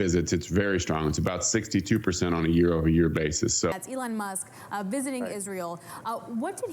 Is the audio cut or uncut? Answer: cut